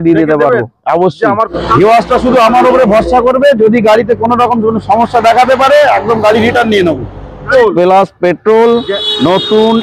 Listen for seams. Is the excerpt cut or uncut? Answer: cut